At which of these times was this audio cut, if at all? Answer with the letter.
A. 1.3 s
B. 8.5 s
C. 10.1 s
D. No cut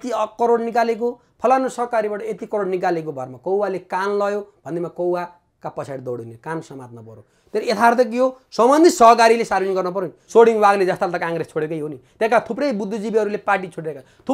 C